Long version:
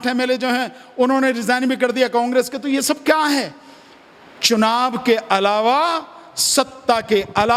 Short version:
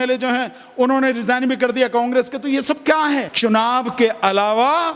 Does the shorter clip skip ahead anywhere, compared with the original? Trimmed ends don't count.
yes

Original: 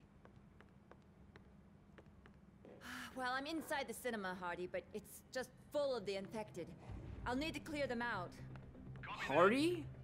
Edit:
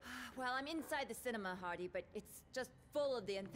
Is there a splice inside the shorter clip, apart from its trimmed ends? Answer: no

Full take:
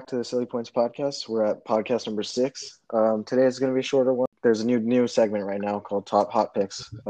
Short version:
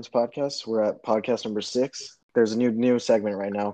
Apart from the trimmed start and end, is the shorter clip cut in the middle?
yes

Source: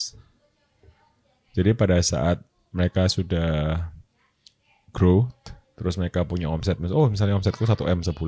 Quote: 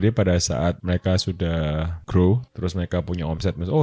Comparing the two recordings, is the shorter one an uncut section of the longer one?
no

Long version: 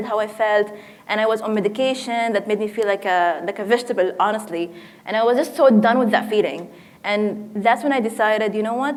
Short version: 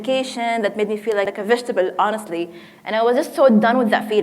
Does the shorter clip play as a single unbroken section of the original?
no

